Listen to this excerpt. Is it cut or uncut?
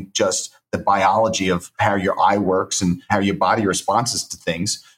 cut